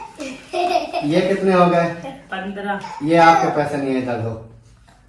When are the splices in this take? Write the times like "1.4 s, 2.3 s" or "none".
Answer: 3.0 s